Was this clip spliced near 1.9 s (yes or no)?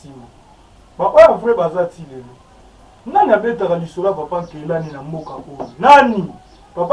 no